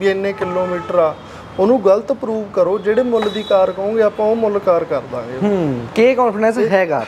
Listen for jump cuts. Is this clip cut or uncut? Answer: uncut